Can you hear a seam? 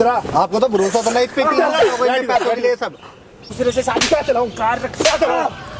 yes; 1 cut; at 3.5 s

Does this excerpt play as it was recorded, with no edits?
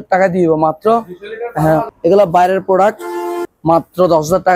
no; 2 cuts; at 1.9 s, 3.4 s

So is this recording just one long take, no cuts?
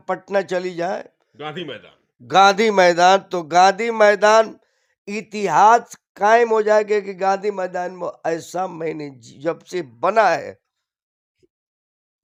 yes; 0 cuts

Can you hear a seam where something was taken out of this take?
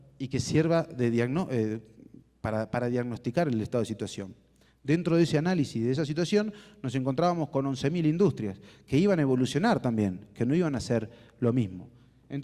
no; 0 cuts

